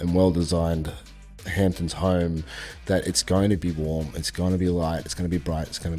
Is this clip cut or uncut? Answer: uncut